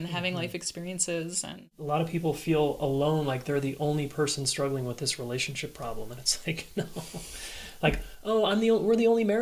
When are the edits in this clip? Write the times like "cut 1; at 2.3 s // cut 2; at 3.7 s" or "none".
cut 1; at 1.7 s